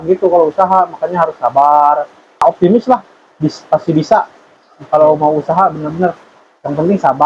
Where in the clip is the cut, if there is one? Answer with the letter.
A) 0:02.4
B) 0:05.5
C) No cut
A